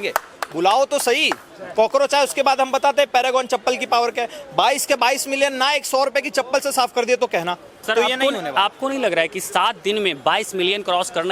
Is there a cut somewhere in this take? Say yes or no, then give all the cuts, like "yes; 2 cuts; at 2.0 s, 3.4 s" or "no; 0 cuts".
yes; 1 cut; at 7.7 s